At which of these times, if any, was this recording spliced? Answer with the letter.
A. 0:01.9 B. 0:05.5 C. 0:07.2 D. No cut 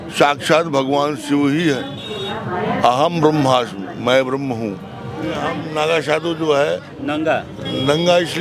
B